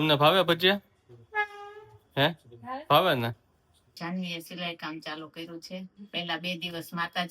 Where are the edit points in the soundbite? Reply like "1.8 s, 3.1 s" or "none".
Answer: 3.8 s, 6.0 s